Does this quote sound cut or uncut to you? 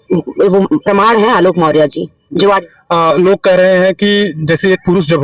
uncut